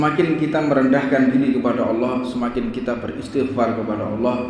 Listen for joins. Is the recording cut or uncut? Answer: uncut